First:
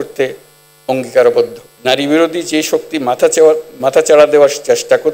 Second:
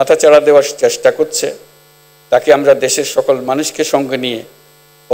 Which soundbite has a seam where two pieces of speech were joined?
first; 1 cut; at 1.6 s

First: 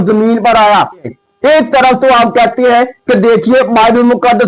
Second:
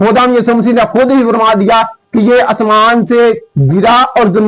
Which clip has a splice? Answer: first; 1 cut; at 1.1 s

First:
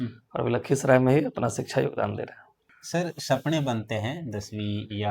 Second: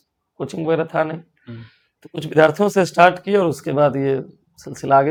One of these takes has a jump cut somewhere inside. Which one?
first; 1 cut; at 2.7 s

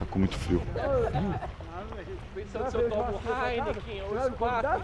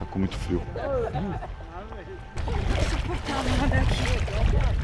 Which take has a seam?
second; 1 cut; at 2.4 s

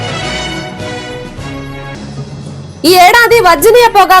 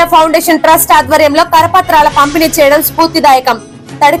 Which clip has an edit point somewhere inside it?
first; 2 cuts; at 1.1 s, 2.7 s

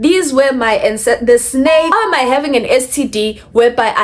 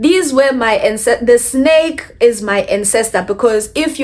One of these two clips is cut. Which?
first; 1 cut; at 1.9 s

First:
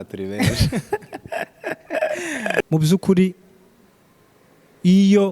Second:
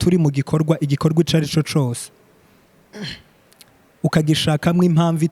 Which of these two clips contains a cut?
first; 1 cut; at 2.6 s

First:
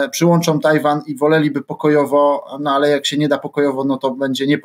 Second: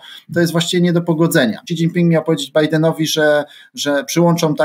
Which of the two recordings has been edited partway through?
second; 1 cut; at 1.6 s

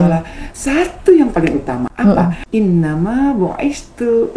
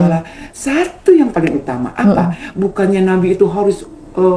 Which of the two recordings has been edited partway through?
first; 1 cut; at 2.4 s

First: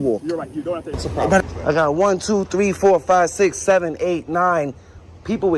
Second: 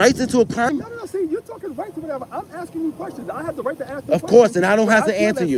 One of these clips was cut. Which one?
first; 1 cut; at 1.4 s

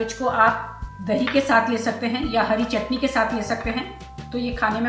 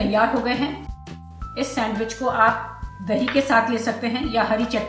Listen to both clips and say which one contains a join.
second; 1 cut; at 1.1 s

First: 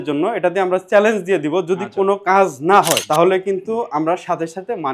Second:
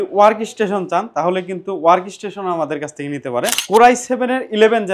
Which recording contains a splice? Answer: second; 1 cut; at 3.6 s

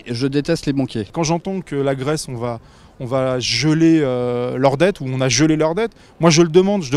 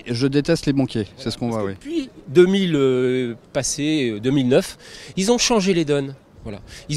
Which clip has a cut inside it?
first; 1 cut; at 1.1 s

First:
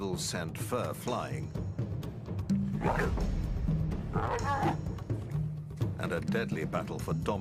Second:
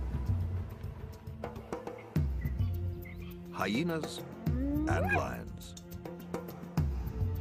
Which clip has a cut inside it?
second; 1 cut; at 3.0 s

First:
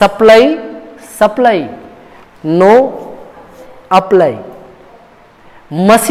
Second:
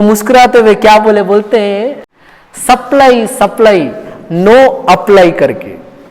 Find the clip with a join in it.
second; 1 cut; at 2.0 s

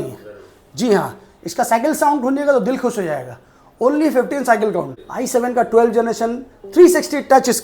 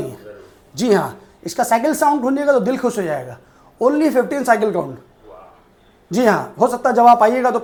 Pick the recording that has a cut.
first; 1 cut; at 5.0 s

